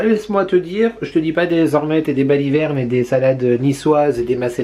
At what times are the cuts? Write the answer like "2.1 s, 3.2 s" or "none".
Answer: none

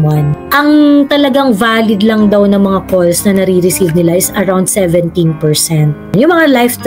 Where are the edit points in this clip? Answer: none

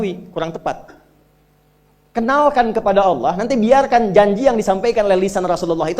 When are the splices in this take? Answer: none

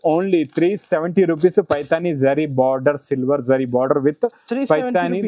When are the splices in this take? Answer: none

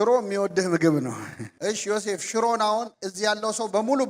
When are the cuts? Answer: 1.5 s

